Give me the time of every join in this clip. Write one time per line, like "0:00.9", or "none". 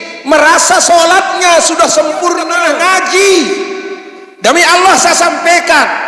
0:02.6